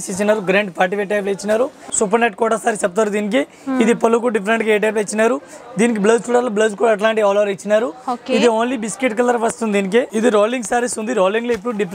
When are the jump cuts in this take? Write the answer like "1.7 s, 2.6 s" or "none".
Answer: 1.8 s, 10.1 s